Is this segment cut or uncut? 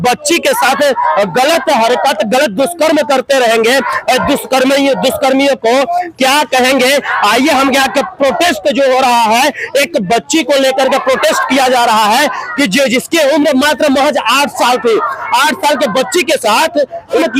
uncut